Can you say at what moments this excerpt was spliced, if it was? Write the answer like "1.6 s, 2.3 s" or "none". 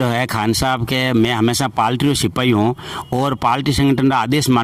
none